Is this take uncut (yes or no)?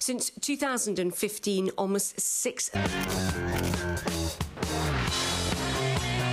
yes